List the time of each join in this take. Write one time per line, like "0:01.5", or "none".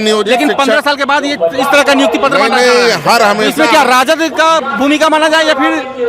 none